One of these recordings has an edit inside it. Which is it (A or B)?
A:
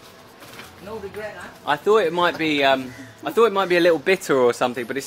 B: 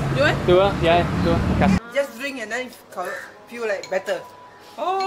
B